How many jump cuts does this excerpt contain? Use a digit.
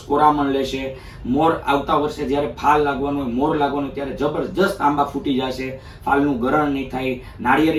0